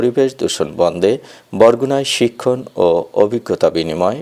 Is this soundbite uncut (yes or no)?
yes